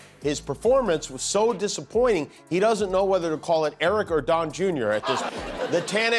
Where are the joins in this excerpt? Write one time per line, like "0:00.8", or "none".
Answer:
0:05.2